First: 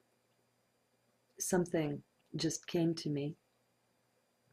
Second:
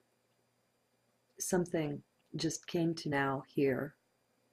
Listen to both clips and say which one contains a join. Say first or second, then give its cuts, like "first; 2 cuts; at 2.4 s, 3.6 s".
first; 1 cut; at 3.1 s